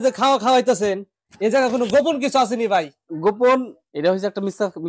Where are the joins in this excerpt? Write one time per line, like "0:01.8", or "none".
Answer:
0:03.8